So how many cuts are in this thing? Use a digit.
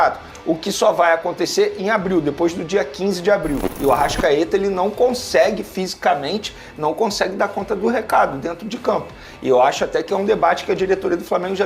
1